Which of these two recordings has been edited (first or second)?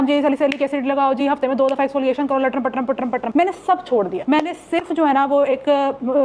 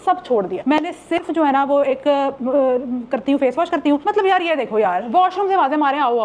second